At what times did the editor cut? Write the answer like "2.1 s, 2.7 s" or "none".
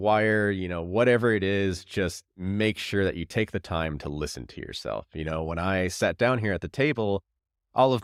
none